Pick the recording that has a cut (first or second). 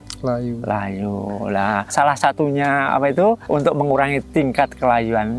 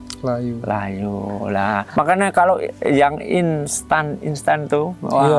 second